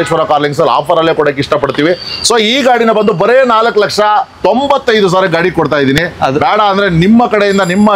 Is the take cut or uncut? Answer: uncut